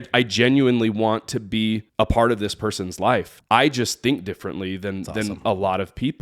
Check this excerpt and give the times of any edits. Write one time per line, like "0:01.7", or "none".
0:01.9
0:03.3